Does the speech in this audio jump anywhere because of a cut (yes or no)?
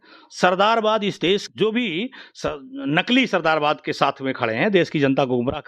yes